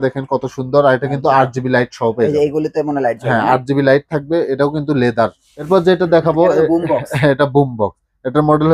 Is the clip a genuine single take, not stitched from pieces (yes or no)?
no